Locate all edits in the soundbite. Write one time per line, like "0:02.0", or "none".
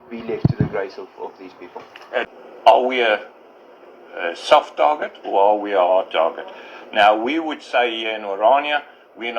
0:02.3